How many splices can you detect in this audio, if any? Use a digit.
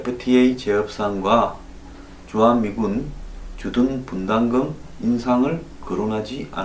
0